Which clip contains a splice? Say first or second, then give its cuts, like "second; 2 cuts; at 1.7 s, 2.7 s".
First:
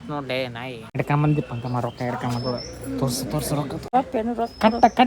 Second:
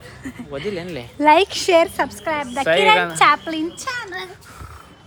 first; 2 cuts; at 1.0 s, 3.9 s